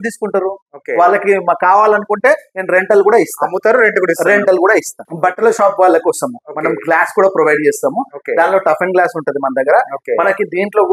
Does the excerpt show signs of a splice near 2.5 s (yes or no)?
no